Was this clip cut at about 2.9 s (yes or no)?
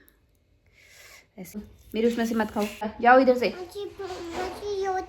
yes